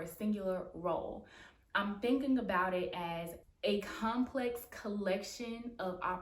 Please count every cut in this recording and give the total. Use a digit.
1